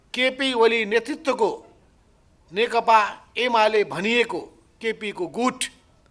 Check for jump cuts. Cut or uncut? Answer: uncut